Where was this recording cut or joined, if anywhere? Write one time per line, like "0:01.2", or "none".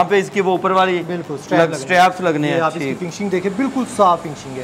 none